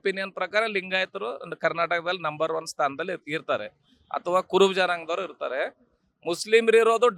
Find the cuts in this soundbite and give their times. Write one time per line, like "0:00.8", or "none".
none

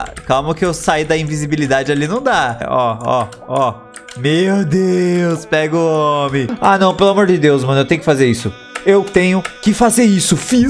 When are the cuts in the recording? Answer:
0:02.6
0:06.5

